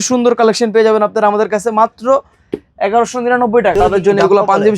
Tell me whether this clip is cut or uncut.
cut